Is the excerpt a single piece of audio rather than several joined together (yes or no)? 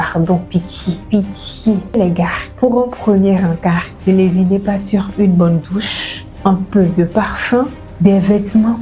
no